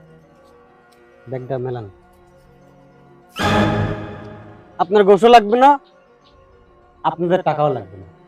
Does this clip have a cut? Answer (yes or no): no